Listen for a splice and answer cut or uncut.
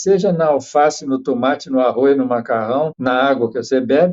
cut